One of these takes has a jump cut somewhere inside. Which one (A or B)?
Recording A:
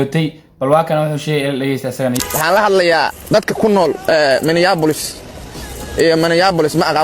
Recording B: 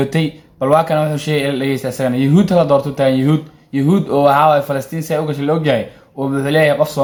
A